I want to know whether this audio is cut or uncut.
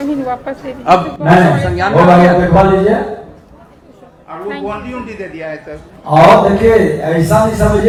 uncut